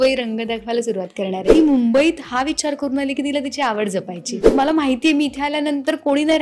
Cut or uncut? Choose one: cut